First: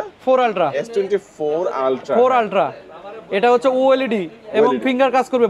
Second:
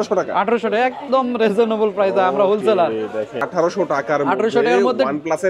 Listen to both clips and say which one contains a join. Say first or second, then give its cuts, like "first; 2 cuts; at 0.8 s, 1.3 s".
second; 1 cut; at 3.4 s